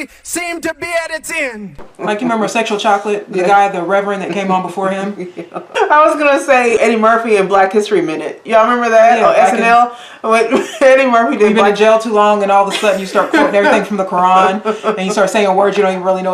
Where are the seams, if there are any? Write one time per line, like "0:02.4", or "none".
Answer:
0:01.8
0:05.7
0:06.8